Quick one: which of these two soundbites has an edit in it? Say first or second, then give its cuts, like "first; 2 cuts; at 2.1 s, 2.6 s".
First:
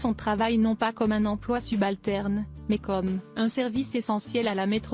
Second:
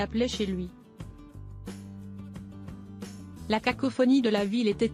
second; 2 cuts; at 0.7 s, 2.9 s